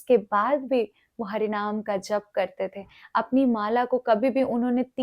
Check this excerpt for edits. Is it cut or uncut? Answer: uncut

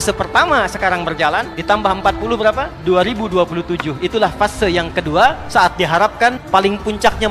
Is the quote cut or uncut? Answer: cut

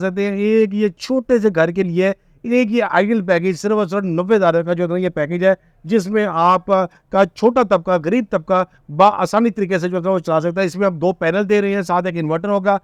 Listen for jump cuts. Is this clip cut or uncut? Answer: uncut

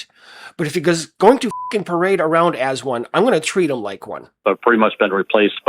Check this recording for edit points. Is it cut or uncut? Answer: cut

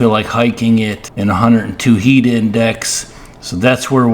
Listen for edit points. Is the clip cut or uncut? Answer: cut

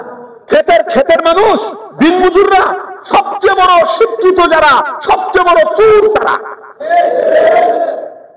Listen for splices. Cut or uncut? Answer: uncut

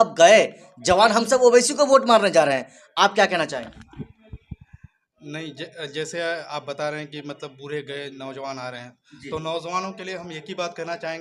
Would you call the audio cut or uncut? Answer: uncut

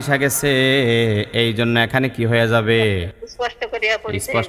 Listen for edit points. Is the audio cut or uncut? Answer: cut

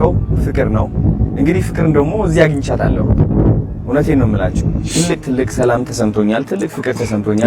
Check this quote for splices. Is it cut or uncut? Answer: uncut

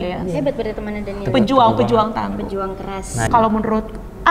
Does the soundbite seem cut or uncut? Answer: cut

